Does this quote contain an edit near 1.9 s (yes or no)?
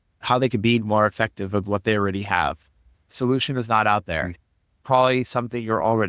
no